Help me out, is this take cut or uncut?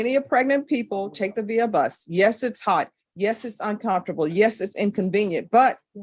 uncut